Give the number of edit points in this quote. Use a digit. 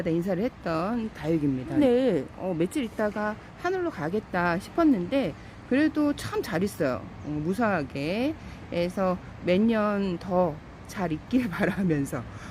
1